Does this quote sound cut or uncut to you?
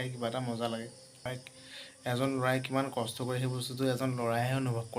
cut